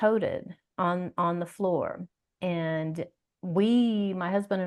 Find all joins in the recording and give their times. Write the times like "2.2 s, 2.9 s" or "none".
none